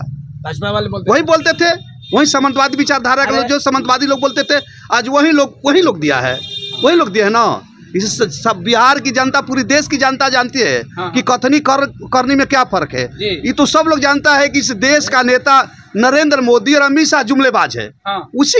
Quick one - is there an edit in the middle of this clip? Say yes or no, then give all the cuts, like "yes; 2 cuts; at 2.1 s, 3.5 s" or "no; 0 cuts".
no; 0 cuts